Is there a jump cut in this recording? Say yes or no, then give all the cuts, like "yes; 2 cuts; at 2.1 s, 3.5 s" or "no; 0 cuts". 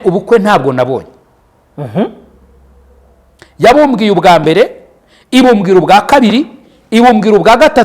no; 0 cuts